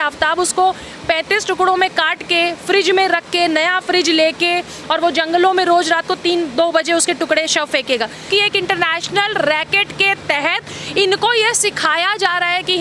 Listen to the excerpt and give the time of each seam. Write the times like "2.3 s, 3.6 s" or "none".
8.3 s